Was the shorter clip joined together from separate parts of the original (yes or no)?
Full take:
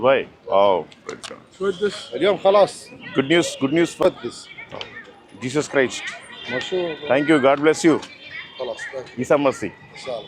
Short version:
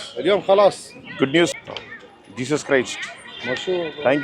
yes